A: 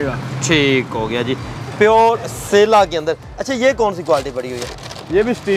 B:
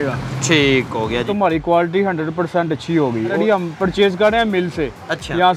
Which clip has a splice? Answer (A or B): B